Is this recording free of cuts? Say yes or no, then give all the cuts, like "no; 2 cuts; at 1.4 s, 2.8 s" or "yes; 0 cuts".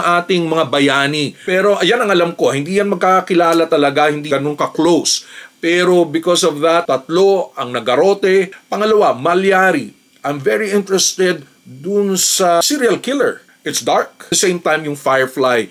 no; 4 cuts; at 1.4 s, 4.4 s, 8.5 s, 13.5 s